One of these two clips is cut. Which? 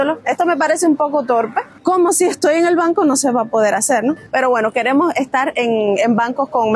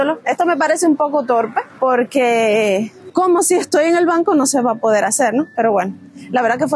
first; 2 cuts; at 1.7 s, 4.2 s

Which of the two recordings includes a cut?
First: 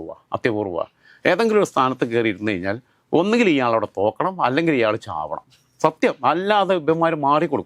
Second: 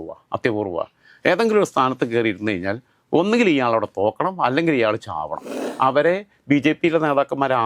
second; 1 cut; at 5.6 s

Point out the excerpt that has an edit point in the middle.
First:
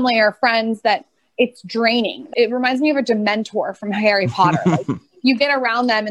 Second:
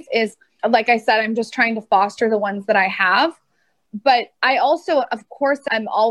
first; 1 cut; at 2.3 s

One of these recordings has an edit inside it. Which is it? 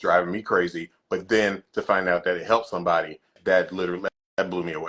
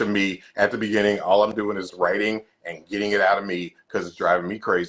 first; 1 cut; at 3.4 s

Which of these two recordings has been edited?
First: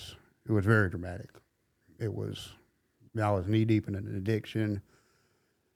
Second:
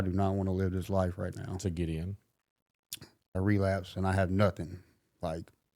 second; 1 cut; at 3.3 s

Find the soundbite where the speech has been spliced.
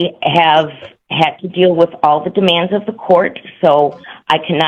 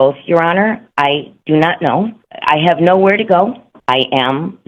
second; 2 cuts; at 2.3 s, 3.7 s

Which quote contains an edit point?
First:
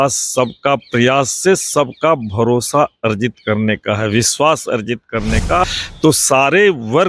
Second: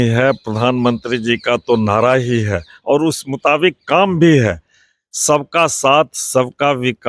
first; 1 cut; at 5.6 s

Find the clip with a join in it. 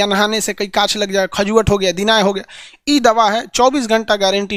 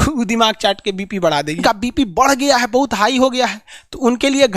second; 1 cut; at 1.6 s

